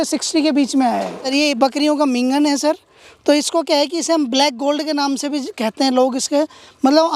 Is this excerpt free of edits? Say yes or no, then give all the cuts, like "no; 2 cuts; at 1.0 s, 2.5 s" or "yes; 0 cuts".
no; 1 cut; at 1.3 s